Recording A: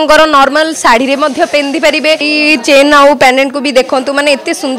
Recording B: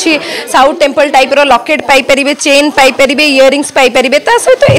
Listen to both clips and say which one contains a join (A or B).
A